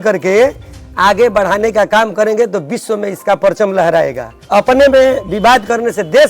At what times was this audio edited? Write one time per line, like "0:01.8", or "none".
0:04.6